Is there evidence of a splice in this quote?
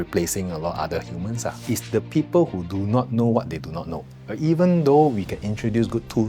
yes; 2 cuts; at 1.6 s, 4.2 s

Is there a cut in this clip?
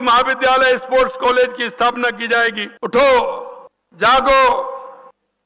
yes; 1 cut; at 2.7 s

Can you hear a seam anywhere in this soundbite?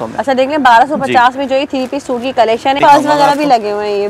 yes; 1 cut; at 2.8 s

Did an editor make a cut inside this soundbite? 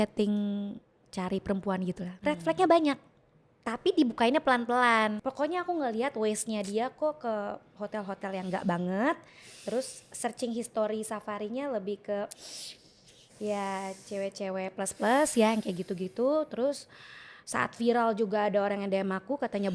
yes; 2 cuts; at 2.1 s, 5.2 s

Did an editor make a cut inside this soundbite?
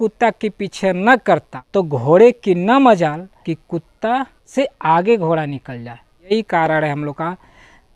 yes; 4 cuts; at 1.6 s, 3.3 s, 4.4 s, 6.3 s

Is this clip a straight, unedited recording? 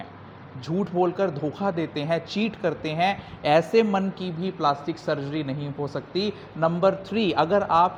yes; 0 cuts

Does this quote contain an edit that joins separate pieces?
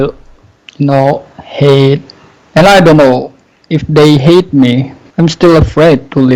yes; 1 cut; at 5.0 s

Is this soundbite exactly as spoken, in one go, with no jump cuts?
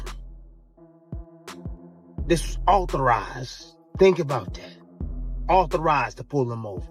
yes; 0 cuts

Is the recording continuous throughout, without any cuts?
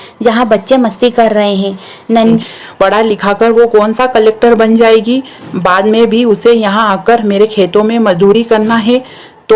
no; 1 cut; at 2.4 s

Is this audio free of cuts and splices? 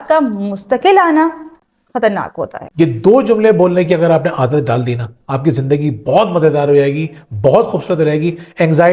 no; 2 cuts; at 1.5 s, 2.6 s

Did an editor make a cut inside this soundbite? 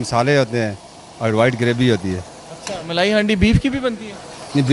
no; 0 cuts

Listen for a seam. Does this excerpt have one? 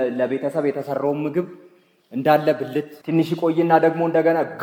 no; 0 cuts

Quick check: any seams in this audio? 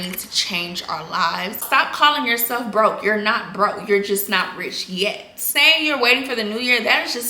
yes; 2 cuts; at 1.6 s, 5.4 s

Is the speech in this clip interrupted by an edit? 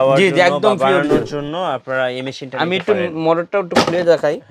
no; 0 cuts

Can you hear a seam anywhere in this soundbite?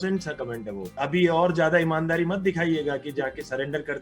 yes; 1 cut; at 0.9 s

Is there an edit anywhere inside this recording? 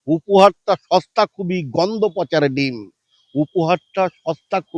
no; 0 cuts

